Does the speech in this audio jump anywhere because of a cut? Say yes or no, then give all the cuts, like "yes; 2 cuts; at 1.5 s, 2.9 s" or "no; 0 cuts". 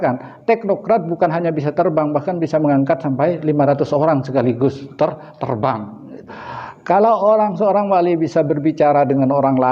yes; 1 cut; at 6.4 s